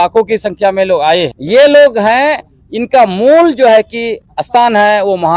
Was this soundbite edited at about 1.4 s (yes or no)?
yes